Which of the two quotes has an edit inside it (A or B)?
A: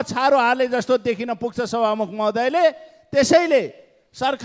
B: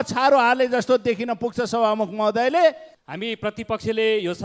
B